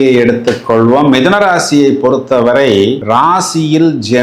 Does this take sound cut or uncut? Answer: uncut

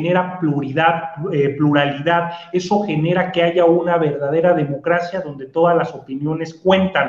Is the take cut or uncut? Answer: uncut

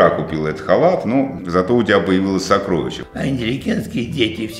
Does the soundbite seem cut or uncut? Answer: cut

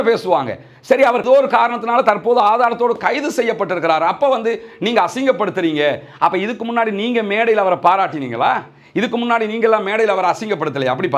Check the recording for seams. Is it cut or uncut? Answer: cut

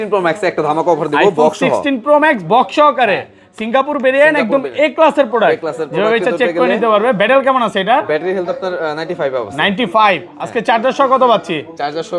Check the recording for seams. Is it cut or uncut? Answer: uncut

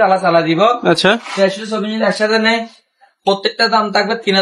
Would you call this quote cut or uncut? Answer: uncut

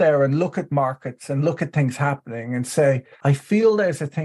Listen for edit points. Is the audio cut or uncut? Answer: cut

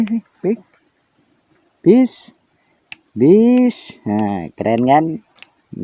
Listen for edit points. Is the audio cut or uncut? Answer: uncut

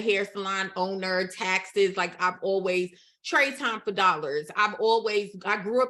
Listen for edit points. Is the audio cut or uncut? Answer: uncut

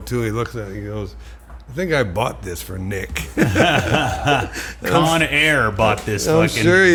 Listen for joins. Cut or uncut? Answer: uncut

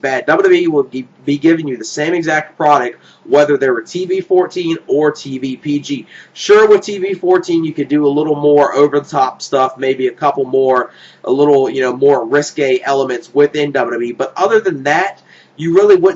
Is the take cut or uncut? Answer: uncut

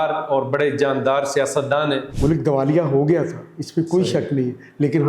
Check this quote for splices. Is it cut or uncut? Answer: cut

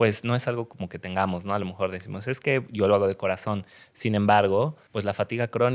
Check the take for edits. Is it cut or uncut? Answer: cut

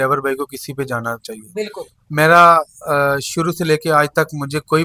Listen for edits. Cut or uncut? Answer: uncut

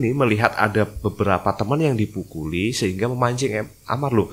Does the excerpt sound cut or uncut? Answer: uncut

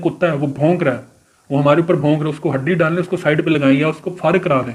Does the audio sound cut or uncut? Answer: uncut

